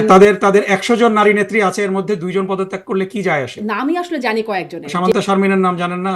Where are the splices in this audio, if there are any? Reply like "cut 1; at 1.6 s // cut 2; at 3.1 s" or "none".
cut 1; at 3.5 s // cut 2; at 4.9 s